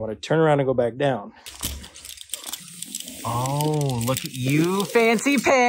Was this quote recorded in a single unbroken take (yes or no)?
no